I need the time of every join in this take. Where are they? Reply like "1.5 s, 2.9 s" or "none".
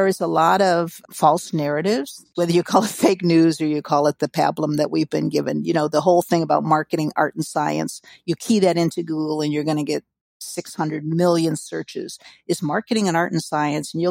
1.0 s, 2.2 s